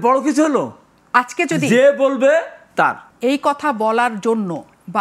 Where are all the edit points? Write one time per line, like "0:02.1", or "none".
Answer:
0:03.1